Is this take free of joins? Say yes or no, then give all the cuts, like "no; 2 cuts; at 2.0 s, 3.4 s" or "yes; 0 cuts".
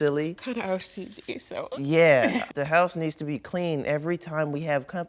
no; 1 cut; at 2.5 s